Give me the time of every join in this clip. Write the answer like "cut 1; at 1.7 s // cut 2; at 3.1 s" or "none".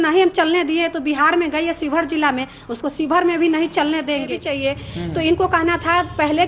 cut 1; at 4.7 s